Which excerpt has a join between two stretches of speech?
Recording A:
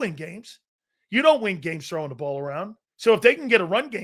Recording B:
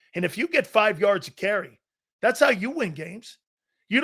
A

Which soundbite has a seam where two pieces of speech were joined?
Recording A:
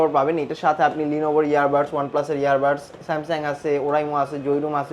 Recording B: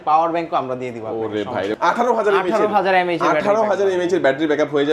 B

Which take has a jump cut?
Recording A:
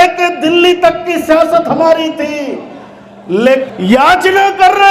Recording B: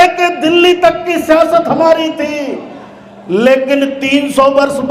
A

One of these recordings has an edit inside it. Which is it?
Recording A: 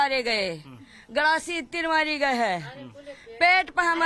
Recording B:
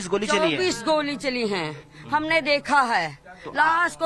B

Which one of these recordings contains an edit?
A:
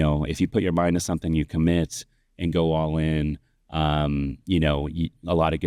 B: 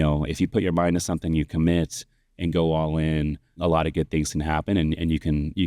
B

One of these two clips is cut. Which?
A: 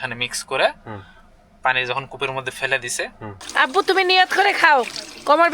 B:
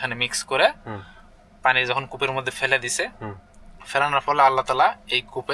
A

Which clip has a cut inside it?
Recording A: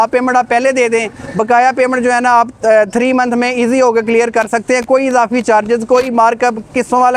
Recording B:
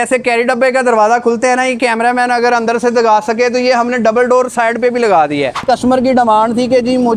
B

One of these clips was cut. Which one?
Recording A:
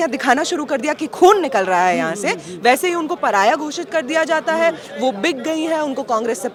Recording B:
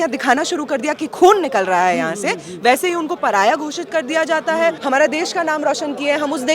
B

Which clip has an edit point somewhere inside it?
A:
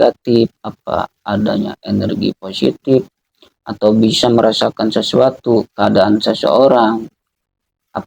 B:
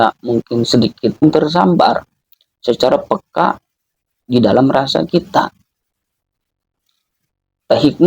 B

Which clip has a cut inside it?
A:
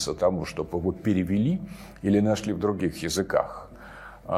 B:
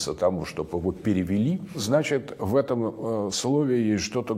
B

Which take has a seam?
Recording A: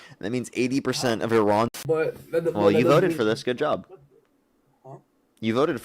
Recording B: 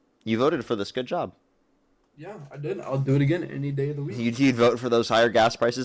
A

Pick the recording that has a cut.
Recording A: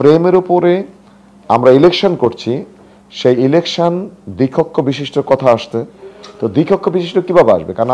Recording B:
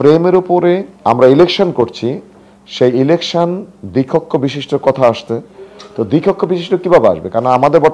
B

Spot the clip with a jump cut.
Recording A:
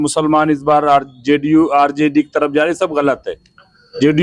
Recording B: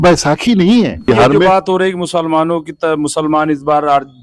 B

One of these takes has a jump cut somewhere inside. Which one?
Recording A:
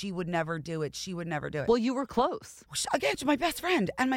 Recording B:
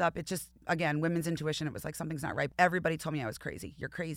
B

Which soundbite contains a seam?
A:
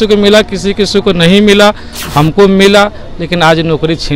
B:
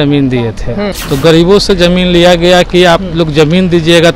B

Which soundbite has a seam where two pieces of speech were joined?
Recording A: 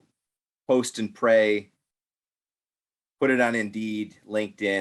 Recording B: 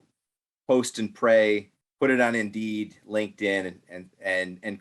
B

